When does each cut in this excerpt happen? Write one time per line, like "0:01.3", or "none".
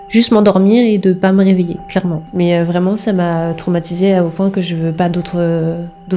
0:02.2